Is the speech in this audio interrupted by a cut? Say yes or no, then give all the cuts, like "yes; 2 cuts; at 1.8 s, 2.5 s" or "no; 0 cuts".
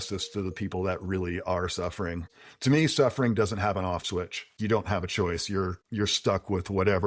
yes; 3 cuts; at 2.2 s, 4.6 s, 5.8 s